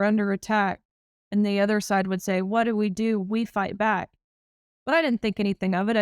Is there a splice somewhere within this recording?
no; 0 cuts

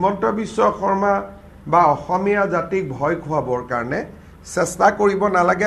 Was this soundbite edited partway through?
no; 0 cuts

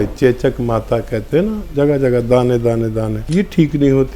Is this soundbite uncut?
no; 2 cuts; at 1.6 s, 3.2 s

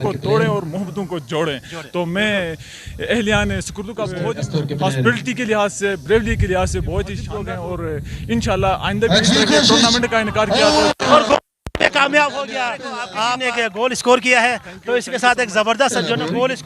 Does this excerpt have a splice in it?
yes; 3 cuts; at 4.1 s, 7.3 s, 13.4 s

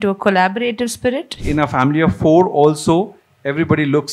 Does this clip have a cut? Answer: yes; 1 cut; at 1.4 s

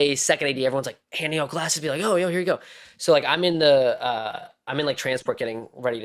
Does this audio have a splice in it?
no; 0 cuts

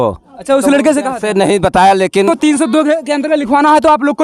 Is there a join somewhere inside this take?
yes; 1 cut; at 2.3 s

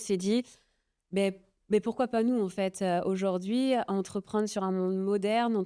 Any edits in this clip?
no; 0 cuts

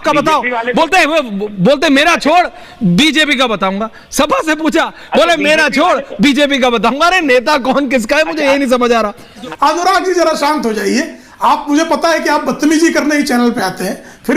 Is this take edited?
yes; 1 cut; at 9.5 s

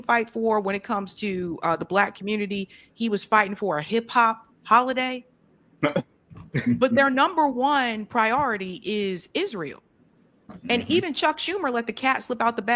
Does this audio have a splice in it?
no; 0 cuts

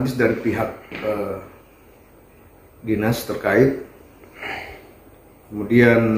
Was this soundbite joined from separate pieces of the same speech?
no; 0 cuts

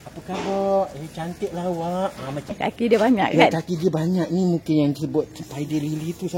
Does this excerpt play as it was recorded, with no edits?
no; 1 cut; at 2.5 s

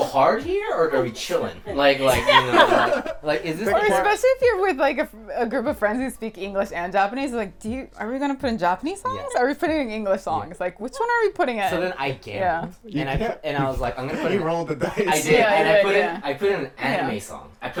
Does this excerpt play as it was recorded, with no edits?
yes; 0 cuts

